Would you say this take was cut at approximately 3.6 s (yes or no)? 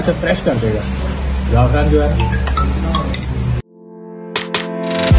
yes